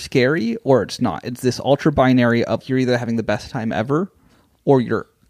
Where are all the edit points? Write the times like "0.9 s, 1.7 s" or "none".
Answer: 2.6 s